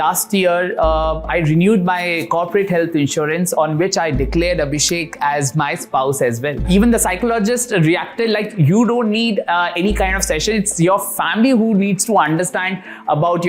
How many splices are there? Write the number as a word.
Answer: one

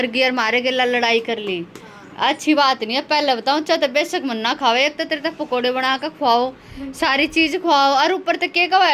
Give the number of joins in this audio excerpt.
zero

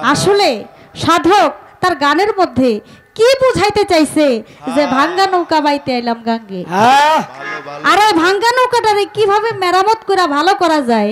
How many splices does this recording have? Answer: zero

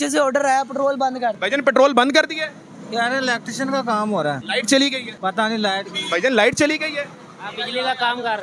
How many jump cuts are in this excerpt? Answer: three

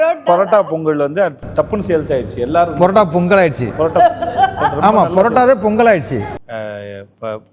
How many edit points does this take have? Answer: one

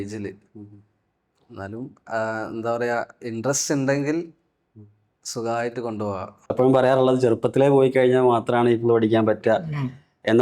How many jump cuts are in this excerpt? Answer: one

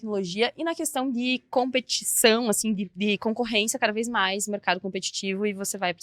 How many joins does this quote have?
zero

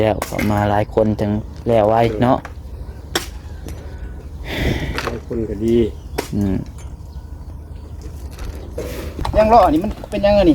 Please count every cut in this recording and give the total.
one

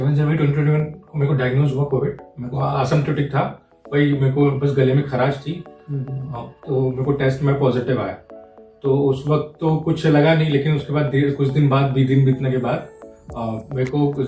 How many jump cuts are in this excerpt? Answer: zero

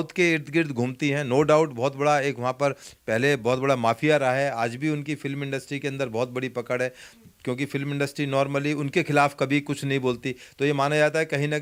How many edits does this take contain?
zero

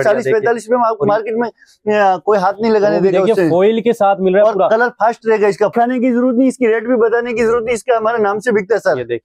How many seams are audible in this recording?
one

